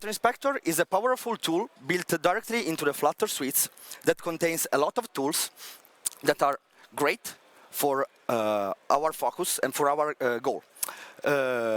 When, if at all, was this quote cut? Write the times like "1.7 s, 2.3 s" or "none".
none